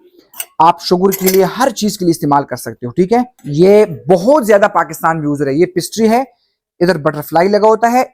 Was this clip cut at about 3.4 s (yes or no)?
yes